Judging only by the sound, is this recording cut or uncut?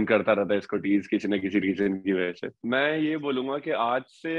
cut